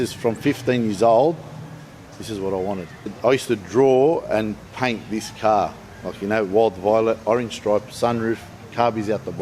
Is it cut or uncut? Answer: cut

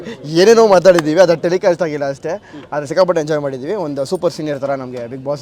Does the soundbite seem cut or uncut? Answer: uncut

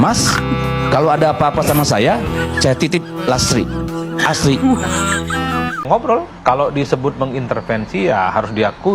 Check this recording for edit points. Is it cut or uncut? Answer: cut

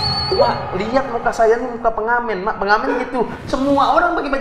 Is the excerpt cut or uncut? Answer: uncut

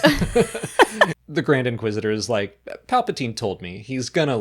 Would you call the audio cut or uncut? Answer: cut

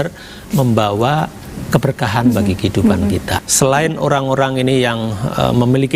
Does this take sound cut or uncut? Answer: cut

